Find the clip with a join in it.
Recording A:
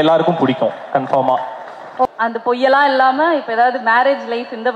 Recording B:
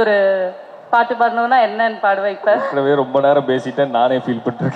A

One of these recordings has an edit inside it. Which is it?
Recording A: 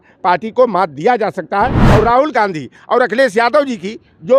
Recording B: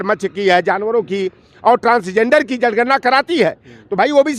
A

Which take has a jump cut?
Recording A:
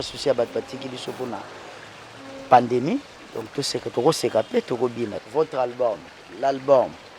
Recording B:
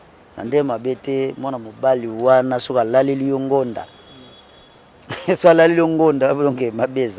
A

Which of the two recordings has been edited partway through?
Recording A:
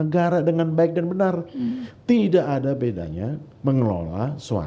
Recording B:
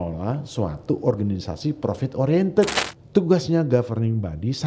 B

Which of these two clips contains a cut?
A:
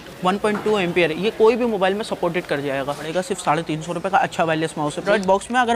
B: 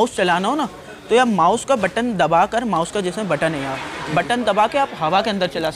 A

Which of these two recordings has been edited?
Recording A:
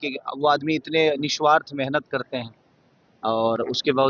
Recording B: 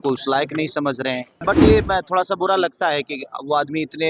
B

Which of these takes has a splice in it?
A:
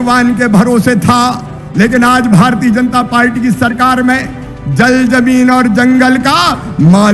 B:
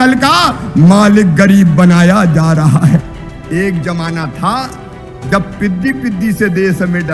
B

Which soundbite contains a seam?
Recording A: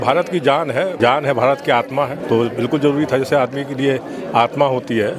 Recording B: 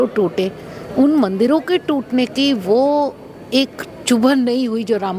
A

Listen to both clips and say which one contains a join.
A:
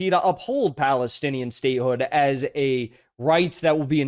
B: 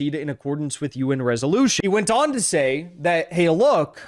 B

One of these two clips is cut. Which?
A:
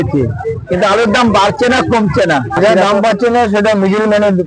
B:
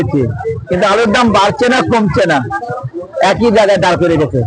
A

